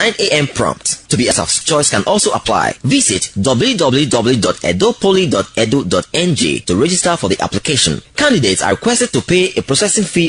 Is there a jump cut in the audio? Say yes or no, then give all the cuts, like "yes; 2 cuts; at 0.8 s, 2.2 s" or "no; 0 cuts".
yes; 1 cut; at 1.3 s